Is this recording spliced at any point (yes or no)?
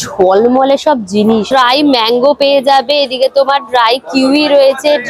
yes